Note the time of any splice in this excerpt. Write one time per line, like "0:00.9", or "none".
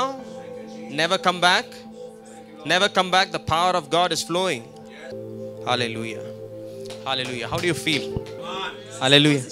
0:08.3